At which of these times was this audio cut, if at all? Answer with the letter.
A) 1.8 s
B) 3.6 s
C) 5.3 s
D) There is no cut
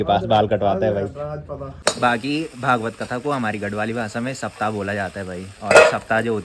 A